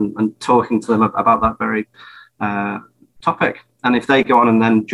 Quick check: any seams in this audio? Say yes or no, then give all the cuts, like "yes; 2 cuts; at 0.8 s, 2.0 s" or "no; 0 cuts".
no; 0 cuts